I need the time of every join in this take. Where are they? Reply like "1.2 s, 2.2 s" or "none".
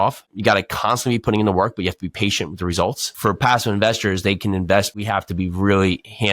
3.1 s, 5.0 s